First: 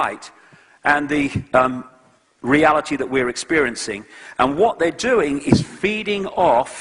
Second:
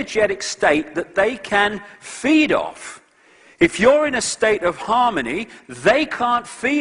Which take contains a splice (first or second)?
second